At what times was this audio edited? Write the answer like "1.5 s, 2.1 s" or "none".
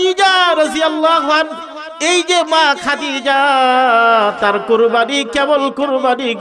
none